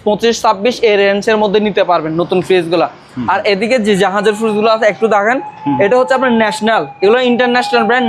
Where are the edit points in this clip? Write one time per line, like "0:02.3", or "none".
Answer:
none